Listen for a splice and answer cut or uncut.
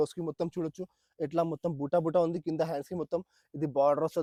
uncut